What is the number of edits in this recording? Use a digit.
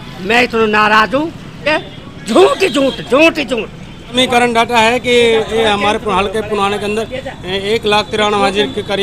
2